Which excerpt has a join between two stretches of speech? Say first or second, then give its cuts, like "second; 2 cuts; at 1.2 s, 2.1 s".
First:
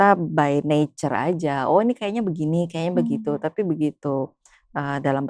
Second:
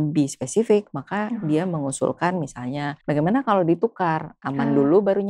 second; 1 cut; at 2.9 s